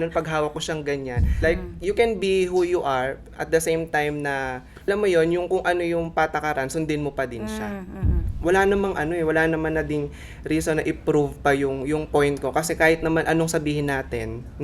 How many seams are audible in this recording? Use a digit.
3